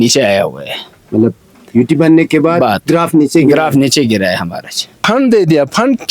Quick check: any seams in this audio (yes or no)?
yes